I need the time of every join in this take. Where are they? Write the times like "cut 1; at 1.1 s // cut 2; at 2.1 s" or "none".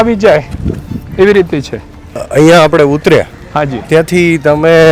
cut 1; at 2.2 s